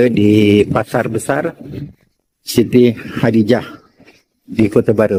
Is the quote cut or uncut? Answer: uncut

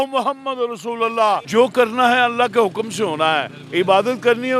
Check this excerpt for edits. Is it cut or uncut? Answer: cut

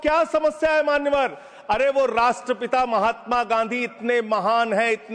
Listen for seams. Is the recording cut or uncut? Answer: uncut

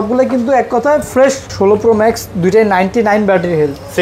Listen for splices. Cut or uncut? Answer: cut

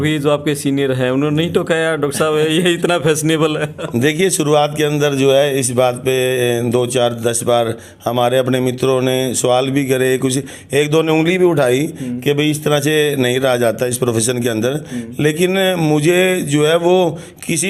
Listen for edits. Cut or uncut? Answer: uncut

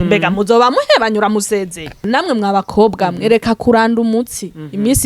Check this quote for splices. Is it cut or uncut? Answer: cut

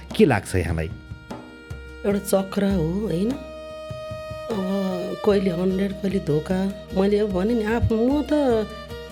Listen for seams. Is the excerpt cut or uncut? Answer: uncut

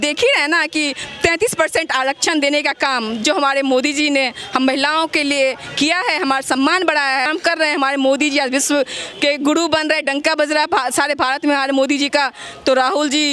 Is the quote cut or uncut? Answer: cut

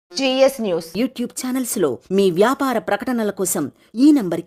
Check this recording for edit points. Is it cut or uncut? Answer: uncut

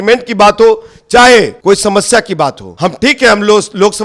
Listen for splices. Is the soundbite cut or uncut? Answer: cut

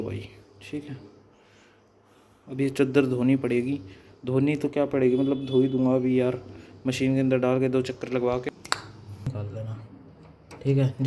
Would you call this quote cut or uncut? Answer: cut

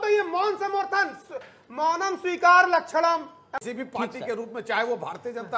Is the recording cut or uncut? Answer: cut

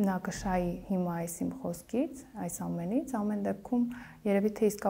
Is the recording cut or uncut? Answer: uncut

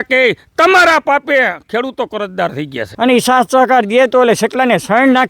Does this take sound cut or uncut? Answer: cut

